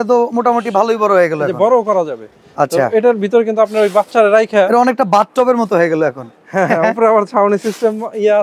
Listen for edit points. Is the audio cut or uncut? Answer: uncut